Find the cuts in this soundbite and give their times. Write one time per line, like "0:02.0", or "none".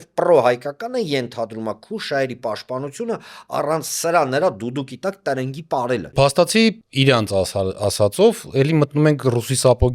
0:06.1
0:06.8